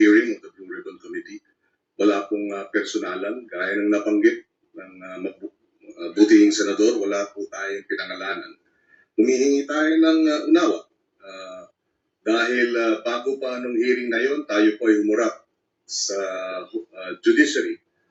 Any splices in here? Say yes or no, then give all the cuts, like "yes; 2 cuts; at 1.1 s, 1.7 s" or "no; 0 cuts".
no; 0 cuts